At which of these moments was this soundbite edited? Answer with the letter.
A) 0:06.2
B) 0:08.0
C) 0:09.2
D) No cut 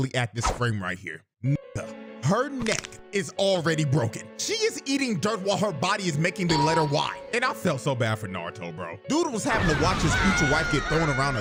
D